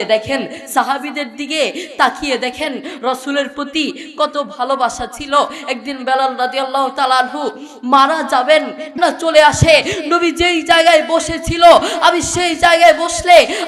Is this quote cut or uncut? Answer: cut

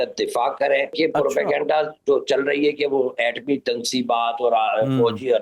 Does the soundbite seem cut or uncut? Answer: cut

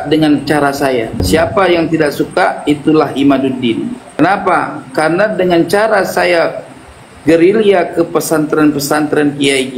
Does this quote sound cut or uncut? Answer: cut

